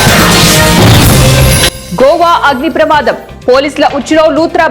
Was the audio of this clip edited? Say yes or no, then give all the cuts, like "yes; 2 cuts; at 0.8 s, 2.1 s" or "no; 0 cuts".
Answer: yes; 1 cut; at 1.7 s